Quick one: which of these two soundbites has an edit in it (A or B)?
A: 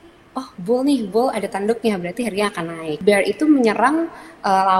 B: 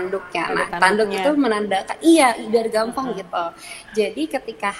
A